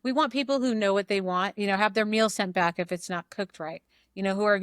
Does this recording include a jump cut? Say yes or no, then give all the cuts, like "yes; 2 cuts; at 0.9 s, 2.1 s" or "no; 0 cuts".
yes; 1 cut; at 1.6 s